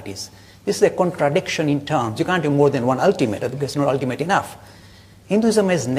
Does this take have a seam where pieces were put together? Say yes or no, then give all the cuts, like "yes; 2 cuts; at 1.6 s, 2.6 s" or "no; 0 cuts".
yes; 1 cut; at 4.9 s